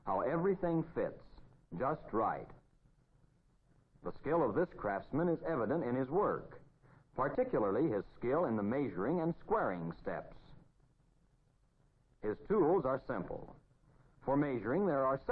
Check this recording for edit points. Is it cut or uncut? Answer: cut